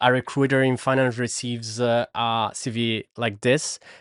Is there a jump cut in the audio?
no; 0 cuts

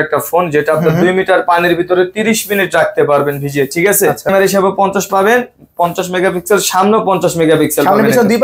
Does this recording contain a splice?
yes; 1 cut; at 4.3 s

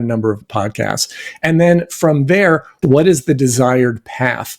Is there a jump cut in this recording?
yes; 1 cut; at 2.7 s

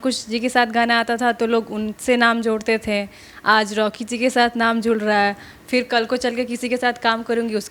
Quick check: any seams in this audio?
no; 0 cuts

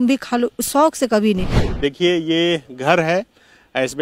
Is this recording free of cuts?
no; 1 cut; at 1.6 s

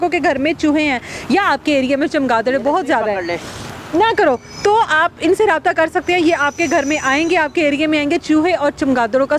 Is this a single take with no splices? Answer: yes; 0 cuts

